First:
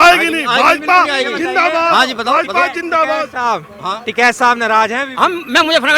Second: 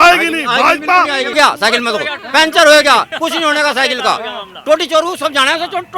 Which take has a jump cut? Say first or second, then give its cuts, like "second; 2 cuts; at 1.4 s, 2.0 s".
second; 1 cut; at 1.3 s